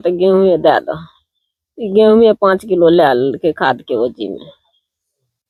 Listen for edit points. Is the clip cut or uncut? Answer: uncut